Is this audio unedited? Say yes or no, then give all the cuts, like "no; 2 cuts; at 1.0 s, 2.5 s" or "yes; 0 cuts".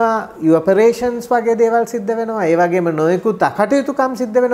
yes; 0 cuts